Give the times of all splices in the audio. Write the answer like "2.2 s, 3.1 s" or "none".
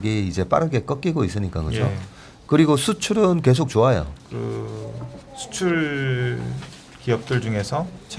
4.2 s

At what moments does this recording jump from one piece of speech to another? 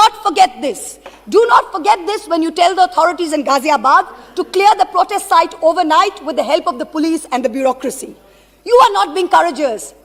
none

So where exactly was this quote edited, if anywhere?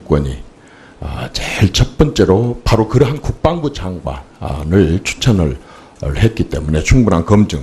5.1 s

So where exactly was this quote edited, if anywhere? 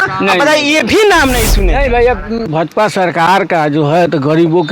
2.5 s

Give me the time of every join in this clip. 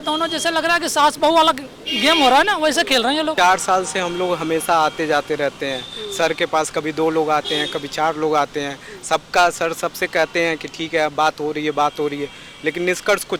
3.3 s

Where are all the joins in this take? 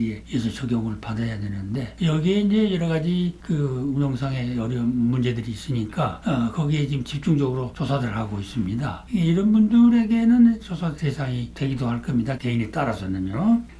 none

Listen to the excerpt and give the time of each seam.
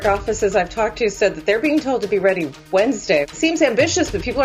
3.3 s

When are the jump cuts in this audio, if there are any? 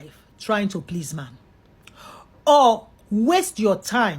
1.6 s

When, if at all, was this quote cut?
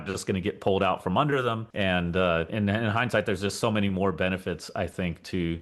1.7 s, 2.5 s

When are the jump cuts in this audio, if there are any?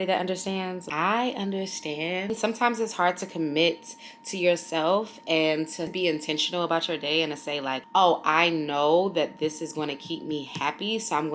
0.8 s, 2.3 s, 7.8 s

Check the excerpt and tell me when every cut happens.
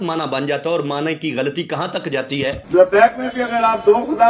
2.6 s

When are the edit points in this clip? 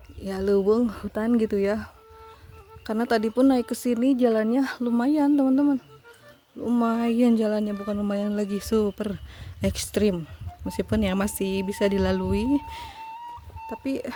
none

